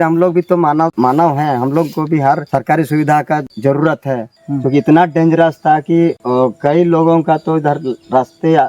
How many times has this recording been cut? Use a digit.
4